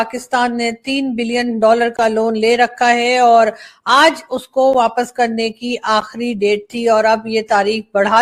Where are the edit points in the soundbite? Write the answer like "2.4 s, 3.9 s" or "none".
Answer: none